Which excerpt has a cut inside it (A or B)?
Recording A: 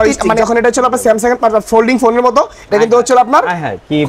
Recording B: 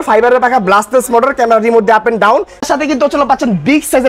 B